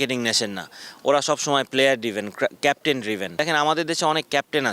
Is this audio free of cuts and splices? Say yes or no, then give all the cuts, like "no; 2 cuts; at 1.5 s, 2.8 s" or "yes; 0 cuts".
no; 1 cut; at 3.4 s